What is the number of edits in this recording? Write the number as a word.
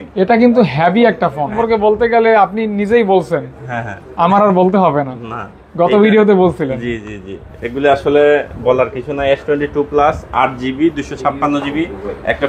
one